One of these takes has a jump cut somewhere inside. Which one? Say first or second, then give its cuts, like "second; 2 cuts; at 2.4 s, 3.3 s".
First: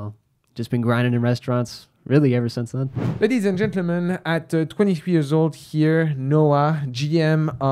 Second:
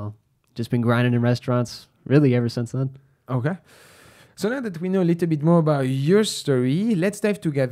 first; 1 cut; at 3.0 s